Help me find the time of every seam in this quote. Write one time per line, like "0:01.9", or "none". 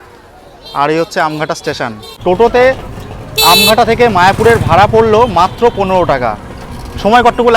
0:02.1